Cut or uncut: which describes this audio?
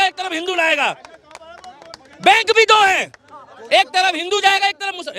uncut